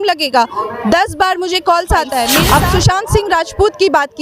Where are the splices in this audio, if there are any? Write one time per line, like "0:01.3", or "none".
0:02.4